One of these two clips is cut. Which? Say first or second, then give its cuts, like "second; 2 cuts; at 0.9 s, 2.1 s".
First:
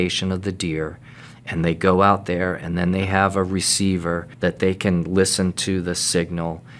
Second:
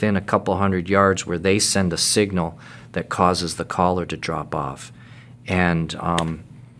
first; 1 cut; at 4.3 s